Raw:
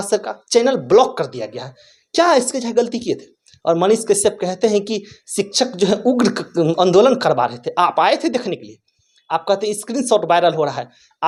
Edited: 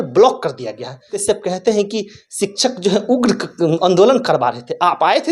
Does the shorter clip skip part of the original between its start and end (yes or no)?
yes